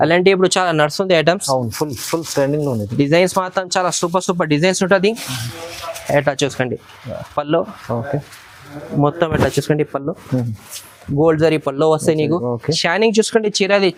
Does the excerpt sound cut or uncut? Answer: uncut